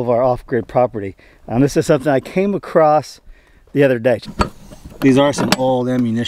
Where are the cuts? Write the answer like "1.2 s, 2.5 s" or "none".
4.3 s